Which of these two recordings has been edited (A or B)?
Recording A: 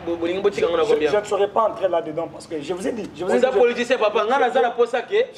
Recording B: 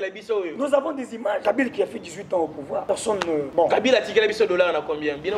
B